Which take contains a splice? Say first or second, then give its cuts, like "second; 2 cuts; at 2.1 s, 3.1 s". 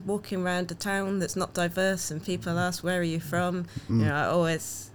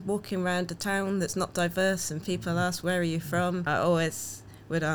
second; 1 cut; at 3.7 s